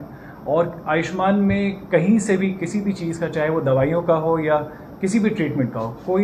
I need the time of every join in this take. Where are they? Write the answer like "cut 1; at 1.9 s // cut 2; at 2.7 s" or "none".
none